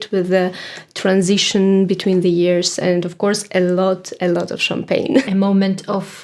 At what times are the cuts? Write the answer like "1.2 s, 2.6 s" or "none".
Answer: 5.3 s